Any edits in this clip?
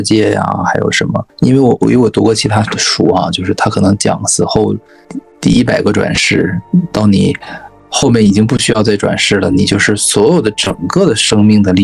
yes; 2 cuts; at 1.2 s, 5.1 s

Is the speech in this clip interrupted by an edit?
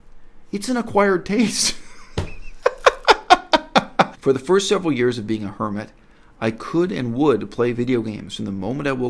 yes; 1 cut; at 4.1 s

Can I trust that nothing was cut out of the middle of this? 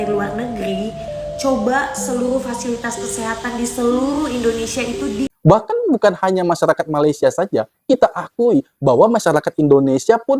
no; 1 cut; at 5.3 s

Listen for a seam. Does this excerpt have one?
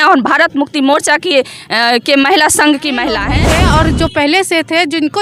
yes; 1 cut; at 3.3 s

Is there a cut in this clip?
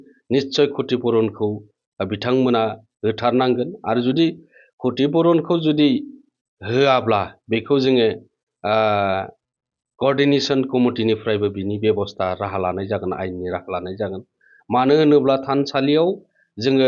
no; 0 cuts

